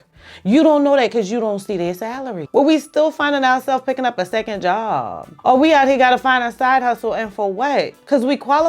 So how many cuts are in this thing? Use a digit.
1